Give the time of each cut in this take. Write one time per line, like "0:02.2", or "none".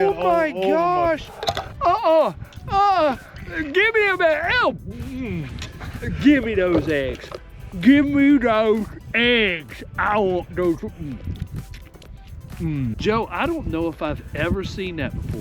0:13.0